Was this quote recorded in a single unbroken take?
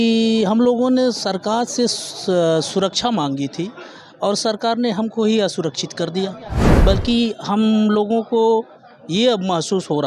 no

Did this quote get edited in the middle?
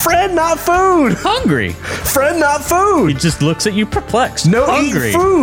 no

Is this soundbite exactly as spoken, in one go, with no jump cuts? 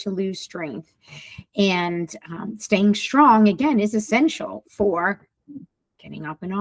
yes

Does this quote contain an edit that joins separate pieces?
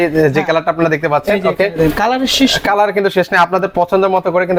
no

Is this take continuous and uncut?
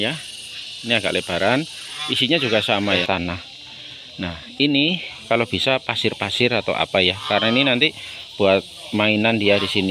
no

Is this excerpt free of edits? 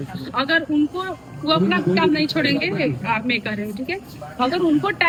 yes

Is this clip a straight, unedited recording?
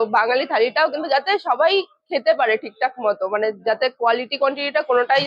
yes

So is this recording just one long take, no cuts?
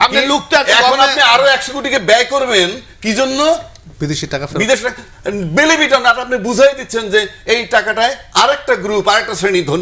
yes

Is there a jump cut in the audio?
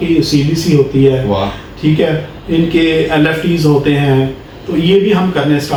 no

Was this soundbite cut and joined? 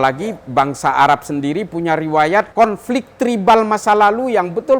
yes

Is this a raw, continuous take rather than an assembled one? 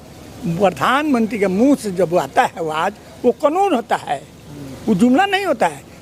yes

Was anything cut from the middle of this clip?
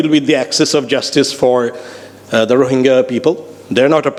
no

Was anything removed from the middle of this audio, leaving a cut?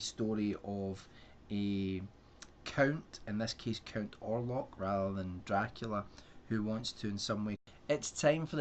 no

